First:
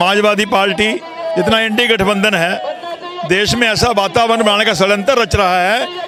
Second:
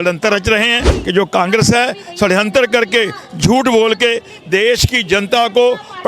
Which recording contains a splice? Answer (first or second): second